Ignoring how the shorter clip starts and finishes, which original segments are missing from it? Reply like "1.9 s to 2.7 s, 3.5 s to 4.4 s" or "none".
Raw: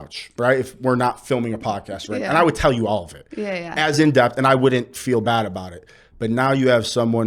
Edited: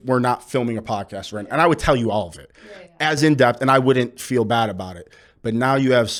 none